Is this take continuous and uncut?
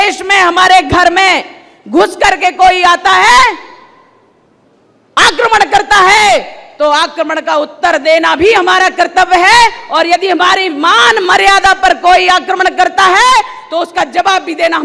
yes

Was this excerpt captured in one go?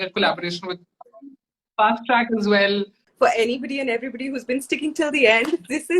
no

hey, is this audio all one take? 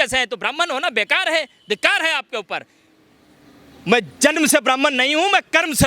yes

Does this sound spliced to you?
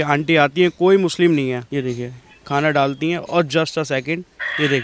no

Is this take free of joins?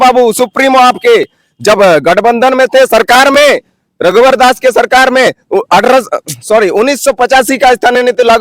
yes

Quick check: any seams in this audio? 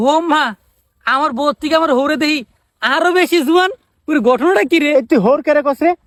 no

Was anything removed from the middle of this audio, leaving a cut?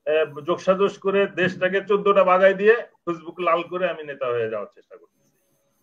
no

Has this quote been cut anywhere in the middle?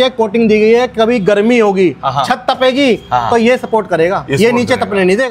no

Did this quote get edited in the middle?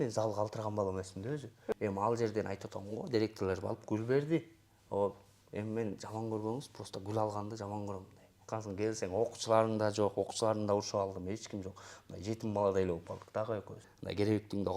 yes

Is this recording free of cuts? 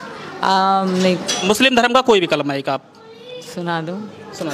no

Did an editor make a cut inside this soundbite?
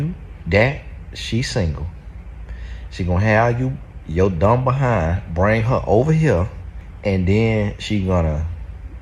yes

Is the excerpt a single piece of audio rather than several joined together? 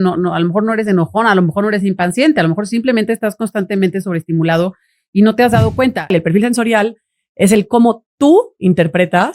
no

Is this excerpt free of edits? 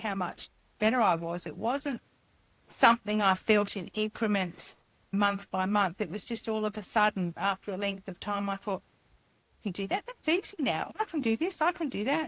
yes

